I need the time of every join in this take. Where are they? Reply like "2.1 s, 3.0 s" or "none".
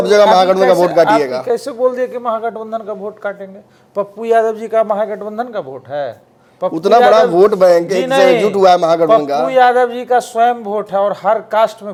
none